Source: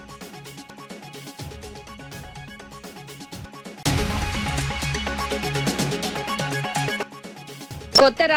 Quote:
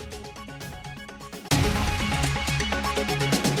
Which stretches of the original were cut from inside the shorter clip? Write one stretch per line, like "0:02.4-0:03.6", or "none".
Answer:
0:03.0-0:03.8